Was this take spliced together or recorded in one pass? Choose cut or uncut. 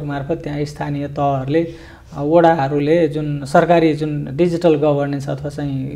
uncut